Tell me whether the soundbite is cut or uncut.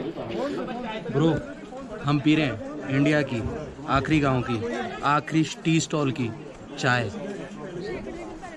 uncut